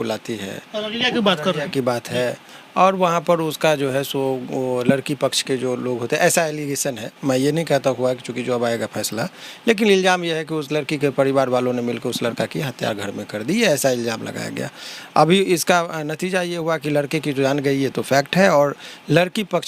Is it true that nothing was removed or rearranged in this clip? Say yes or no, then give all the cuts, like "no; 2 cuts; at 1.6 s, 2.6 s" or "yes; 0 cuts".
yes; 0 cuts